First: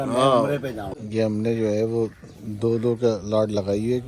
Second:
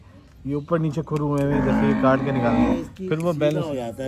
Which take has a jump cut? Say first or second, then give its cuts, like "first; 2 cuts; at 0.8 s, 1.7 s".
first; 1 cut; at 0.9 s